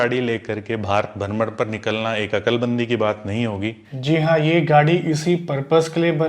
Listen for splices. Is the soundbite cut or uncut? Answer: cut